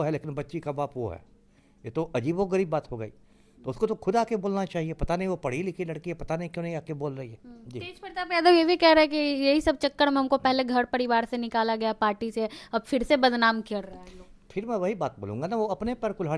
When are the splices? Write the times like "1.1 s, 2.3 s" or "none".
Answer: none